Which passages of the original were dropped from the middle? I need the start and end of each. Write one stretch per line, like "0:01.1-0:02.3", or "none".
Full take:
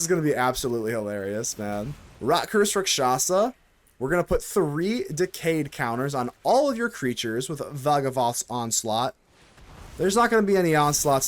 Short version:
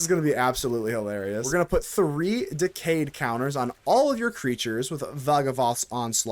0:01.4-0:04.0